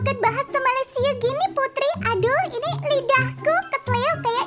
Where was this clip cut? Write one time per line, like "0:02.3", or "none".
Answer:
none